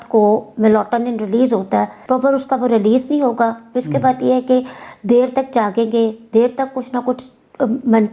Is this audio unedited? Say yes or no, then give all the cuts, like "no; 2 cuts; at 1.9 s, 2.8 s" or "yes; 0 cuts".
yes; 0 cuts